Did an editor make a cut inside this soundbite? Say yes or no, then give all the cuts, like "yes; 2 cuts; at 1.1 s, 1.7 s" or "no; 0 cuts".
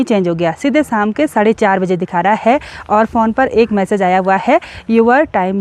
no; 0 cuts